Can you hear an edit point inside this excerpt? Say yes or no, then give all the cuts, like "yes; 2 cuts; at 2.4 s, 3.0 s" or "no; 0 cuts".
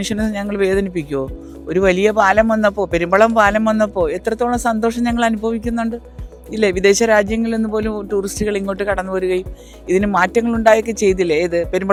no; 0 cuts